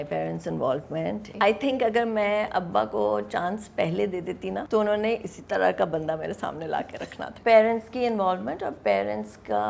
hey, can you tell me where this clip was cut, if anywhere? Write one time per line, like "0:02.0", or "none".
0:01.3
0:04.6
0:07.3

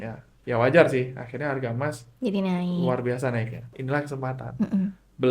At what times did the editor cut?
0:03.7

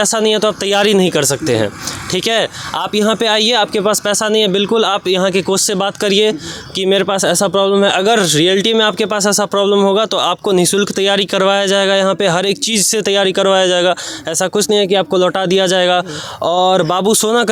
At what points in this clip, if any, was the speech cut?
none

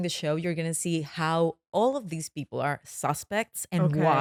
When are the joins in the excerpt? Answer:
none

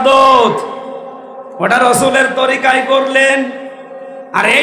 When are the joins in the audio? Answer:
none

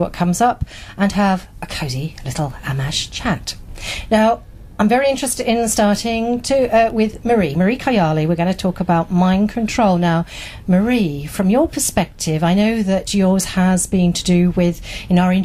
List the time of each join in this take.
none

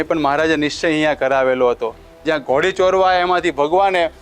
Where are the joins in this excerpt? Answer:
0:02.2

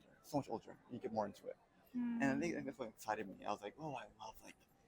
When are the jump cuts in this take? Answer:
0:01.8

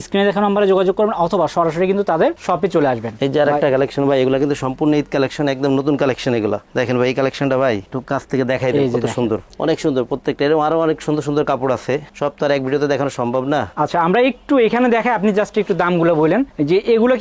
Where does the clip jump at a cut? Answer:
none

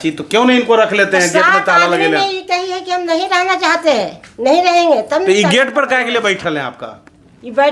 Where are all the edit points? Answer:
none

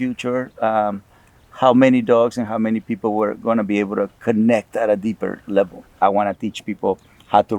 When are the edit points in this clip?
0:05.8

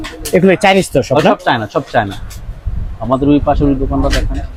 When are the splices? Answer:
none

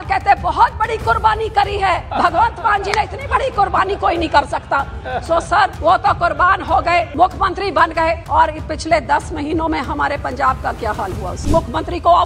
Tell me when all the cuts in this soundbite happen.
0:02.1
0:05.8
0:07.1
0:08.2
0:11.4

